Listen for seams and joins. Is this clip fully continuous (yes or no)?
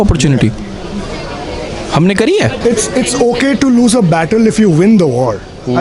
no